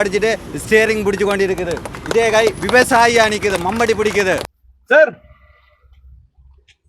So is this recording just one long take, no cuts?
no; 1 cut; at 4.5 s

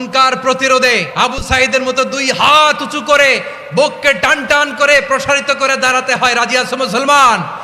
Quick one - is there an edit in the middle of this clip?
yes; 1 cut; at 1.1 s

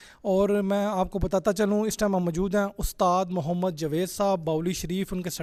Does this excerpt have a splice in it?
no; 0 cuts

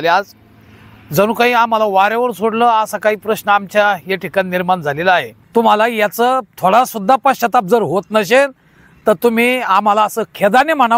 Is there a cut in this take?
yes; 1 cut; at 5.4 s

